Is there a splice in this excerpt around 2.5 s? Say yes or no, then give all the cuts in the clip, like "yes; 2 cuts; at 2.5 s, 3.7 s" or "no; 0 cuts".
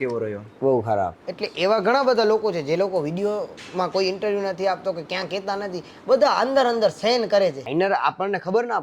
no; 2 cuts; at 1.2 s, 7.6 s